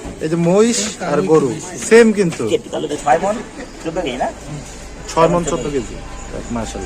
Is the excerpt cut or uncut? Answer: cut